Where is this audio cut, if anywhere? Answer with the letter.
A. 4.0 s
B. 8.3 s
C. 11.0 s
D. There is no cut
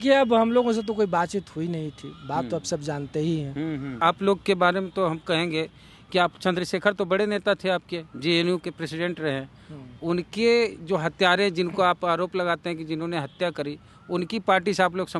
A